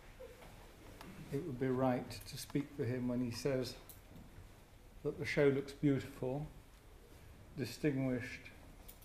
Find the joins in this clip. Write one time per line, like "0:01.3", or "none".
0:02.7